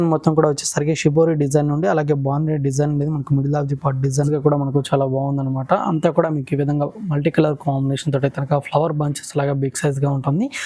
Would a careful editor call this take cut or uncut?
cut